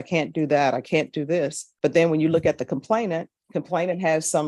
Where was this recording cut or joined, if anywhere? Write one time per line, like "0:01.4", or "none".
0:01.6
0:03.4